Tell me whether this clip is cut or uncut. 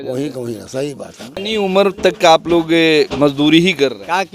cut